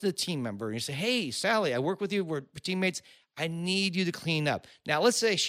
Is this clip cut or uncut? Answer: uncut